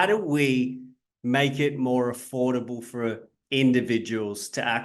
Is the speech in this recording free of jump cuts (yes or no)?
yes